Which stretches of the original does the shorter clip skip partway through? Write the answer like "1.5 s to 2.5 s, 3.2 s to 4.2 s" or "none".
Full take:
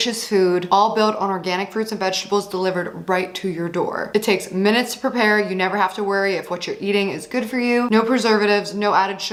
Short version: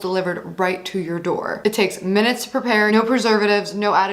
5.4 s to 7.9 s